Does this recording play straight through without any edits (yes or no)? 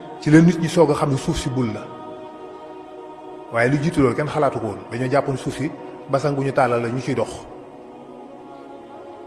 yes